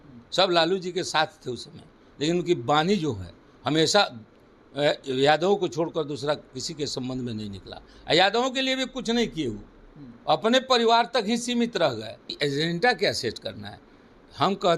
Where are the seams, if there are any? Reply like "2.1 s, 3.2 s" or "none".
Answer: 12.2 s